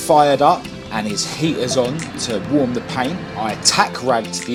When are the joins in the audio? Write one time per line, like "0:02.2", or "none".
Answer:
none